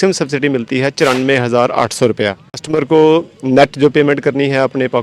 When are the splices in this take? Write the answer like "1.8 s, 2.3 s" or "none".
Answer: 2.7 s